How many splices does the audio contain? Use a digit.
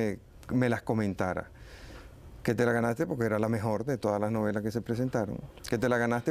0